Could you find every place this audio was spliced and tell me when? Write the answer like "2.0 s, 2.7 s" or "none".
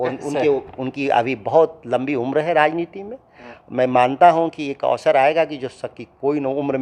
none